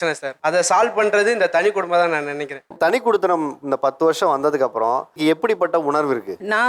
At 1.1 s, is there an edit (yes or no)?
no